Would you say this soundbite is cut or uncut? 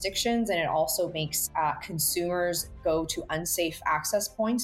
uncut